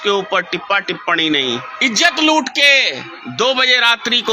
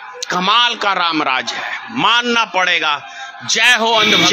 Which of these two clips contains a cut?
first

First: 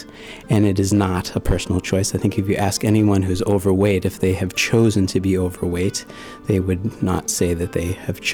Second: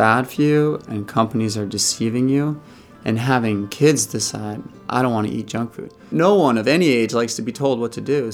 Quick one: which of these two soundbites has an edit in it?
second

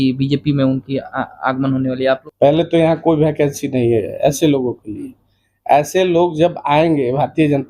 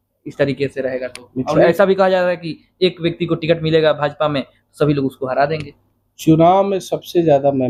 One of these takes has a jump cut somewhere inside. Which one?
first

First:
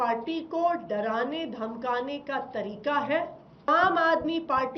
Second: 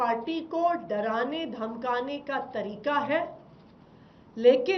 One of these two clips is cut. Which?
first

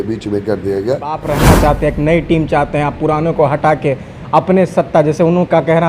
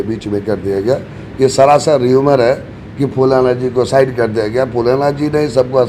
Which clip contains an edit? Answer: first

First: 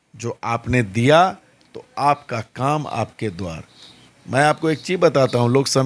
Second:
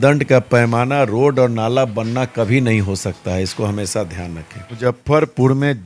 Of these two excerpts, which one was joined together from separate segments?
second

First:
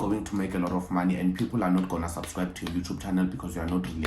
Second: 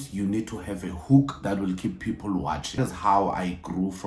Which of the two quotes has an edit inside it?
second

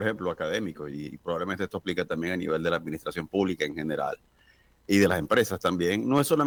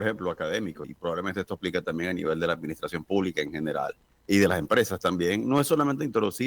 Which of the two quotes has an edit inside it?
second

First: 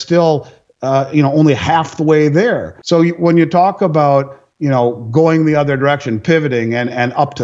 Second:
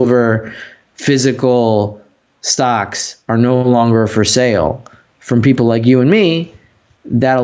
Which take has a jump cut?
first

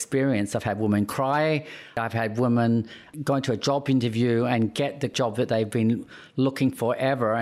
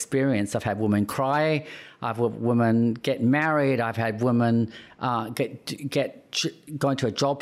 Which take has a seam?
first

